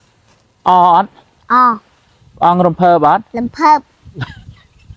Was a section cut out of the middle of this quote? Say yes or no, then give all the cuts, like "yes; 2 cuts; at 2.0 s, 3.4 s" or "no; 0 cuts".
no; 0 cuts